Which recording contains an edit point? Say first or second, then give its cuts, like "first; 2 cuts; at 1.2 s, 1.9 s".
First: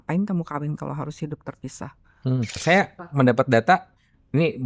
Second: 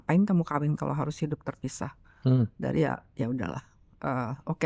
first; 1 cut; at 2.6 s